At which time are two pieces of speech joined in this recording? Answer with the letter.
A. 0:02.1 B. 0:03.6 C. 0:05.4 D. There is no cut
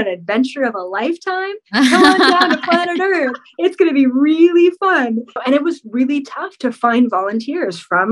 C